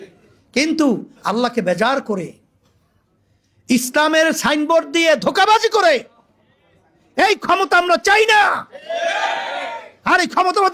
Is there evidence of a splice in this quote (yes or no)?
no